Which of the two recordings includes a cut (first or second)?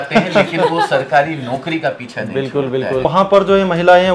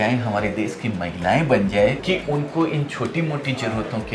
first